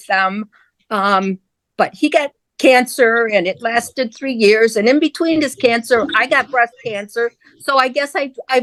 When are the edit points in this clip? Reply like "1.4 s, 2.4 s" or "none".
none